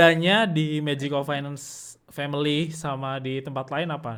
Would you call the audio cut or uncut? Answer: uncut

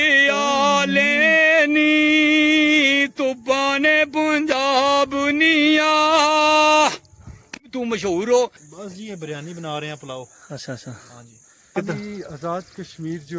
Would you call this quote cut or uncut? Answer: cut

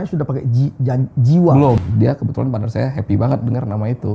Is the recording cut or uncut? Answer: cut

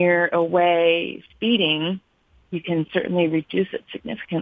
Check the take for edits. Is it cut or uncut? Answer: uncut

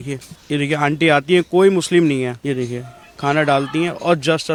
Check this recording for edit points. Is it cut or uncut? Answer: uncut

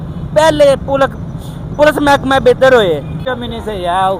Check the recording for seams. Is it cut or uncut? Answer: cut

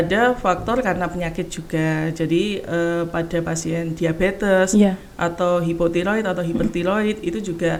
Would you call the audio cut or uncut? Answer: uncut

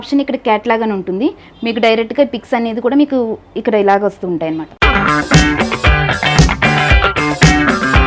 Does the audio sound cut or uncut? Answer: cut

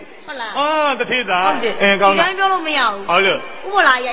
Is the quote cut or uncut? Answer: cut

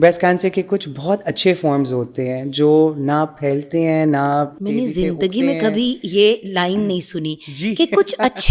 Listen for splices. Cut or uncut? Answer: uncut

